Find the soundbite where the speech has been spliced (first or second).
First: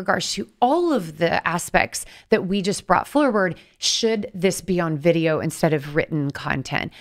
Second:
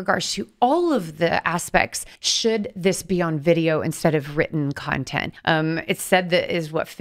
second